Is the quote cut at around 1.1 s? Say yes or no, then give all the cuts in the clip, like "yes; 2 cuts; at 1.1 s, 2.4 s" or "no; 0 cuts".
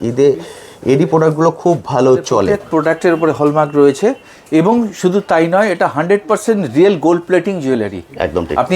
no; 1 cut; at 2.6 s